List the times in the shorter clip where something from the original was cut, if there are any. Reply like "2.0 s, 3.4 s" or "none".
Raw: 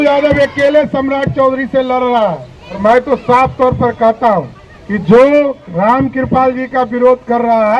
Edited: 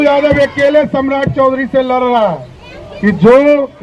2.7 s